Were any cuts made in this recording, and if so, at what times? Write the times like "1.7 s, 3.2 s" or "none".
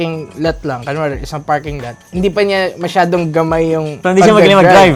none